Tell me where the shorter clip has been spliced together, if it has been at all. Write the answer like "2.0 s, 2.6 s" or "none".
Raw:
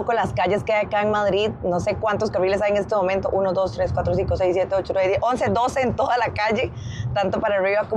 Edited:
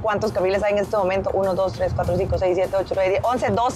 none